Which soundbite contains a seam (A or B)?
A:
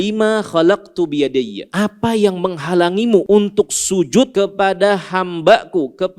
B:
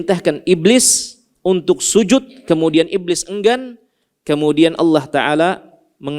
A